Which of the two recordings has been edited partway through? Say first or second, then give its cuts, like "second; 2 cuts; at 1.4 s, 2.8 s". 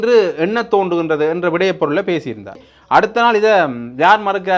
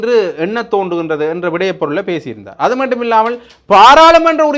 first; 1 cut; at 2.5 s